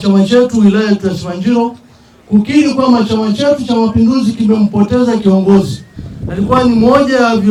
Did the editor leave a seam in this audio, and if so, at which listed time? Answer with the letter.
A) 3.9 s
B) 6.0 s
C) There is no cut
C